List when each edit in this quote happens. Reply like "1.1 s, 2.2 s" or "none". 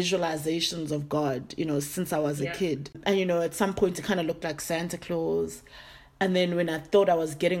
2.9 s